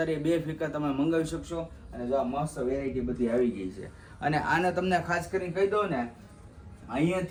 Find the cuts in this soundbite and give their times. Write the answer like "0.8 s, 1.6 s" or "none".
none